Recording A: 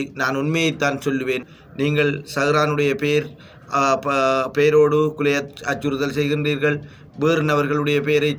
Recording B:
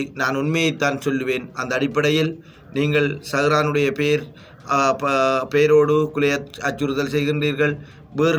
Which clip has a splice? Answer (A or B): A